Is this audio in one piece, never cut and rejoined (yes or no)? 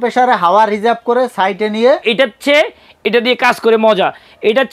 no